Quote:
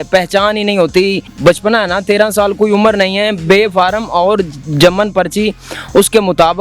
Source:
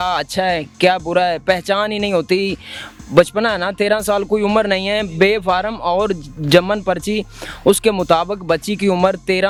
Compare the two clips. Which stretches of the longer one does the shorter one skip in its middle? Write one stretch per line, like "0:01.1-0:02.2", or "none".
0:02.6-0:03.0